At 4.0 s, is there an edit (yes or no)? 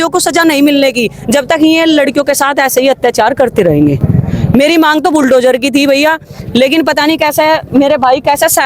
no